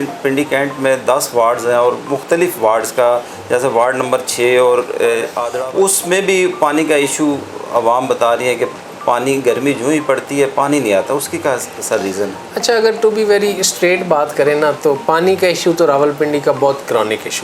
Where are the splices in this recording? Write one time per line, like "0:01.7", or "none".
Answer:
0:05.4